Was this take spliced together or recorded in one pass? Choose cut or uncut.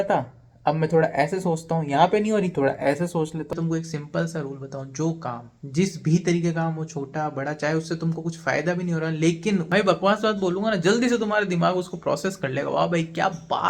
cut